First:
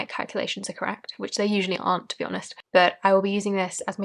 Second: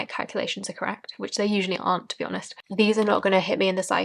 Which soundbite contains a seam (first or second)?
second